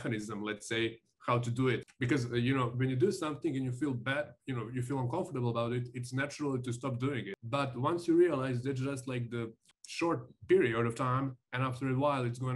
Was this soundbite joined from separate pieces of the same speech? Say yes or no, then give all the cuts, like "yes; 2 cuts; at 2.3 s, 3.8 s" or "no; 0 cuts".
yes; 1 cut; at 7.4 s